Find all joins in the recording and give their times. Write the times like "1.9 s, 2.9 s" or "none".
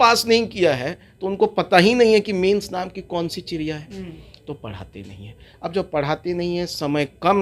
none